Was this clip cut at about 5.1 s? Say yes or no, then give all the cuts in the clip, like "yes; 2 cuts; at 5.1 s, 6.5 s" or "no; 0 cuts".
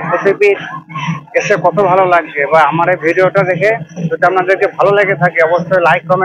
no; 0 cuts